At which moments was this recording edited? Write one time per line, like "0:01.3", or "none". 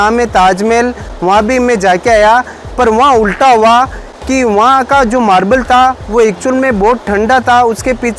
none